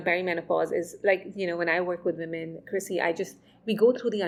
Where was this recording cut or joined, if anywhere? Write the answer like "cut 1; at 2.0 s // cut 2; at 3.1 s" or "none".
none